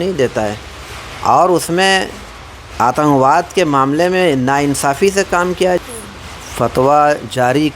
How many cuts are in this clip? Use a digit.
1